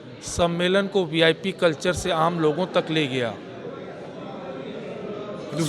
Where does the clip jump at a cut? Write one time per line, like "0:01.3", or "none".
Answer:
none